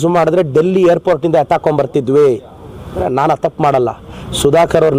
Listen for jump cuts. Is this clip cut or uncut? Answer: cut